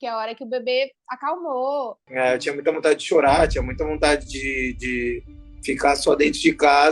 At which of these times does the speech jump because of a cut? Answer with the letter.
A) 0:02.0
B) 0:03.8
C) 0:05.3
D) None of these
A